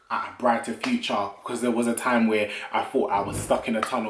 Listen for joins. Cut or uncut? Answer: uncut